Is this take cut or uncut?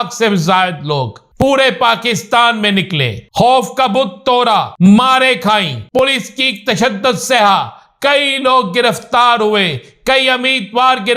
cut